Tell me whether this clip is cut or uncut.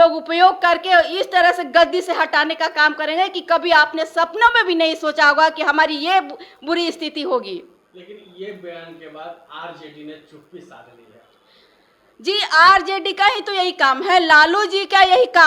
uncut